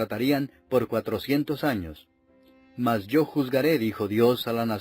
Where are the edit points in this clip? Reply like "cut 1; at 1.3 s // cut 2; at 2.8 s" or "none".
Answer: cut 1; at 2.0 s